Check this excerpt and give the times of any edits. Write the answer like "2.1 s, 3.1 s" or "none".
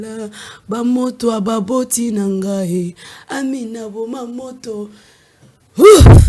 none

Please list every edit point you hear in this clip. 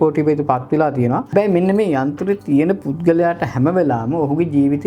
1.3 s

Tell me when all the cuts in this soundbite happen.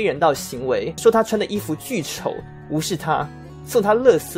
0.9 s

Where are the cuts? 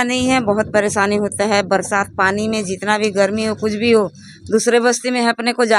none

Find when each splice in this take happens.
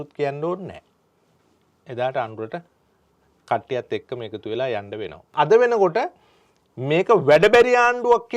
5.3 s

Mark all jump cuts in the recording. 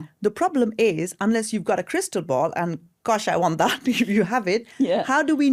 none

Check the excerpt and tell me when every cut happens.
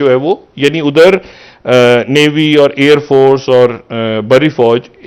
none

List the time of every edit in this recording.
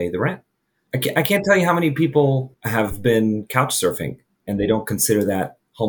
0.9 s, 2.6 s

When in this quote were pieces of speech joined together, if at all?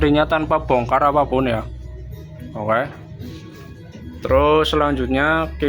none

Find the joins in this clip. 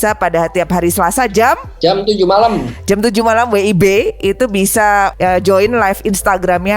1.7 s, 5.1 s

